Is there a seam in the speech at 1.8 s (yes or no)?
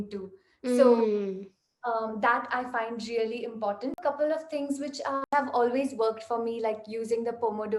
no